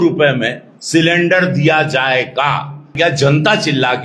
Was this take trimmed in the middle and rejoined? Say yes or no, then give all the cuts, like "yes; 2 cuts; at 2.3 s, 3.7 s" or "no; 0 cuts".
yes; 1 cut; at 2.9 s